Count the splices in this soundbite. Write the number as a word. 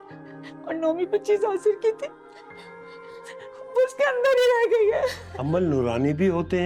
one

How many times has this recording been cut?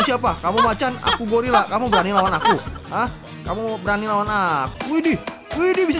one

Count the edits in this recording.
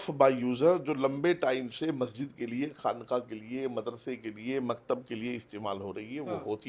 zero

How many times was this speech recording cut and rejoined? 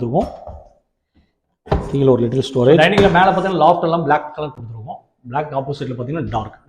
one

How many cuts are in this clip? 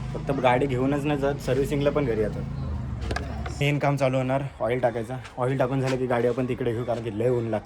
one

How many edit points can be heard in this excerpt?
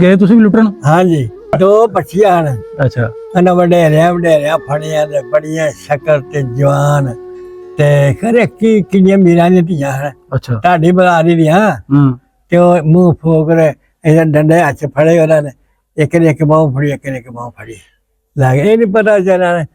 one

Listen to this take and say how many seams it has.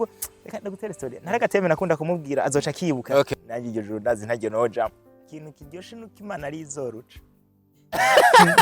two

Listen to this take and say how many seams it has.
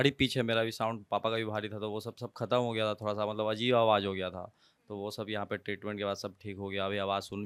zero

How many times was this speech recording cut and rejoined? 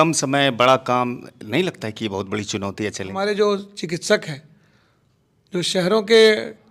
one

